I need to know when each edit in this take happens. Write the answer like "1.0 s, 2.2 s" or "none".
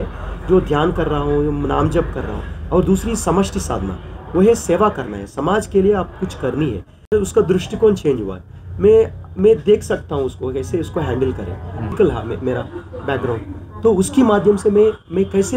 7.1 s, 11.9 s